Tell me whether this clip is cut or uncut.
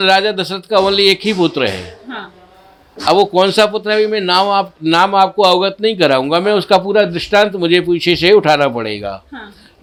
uncut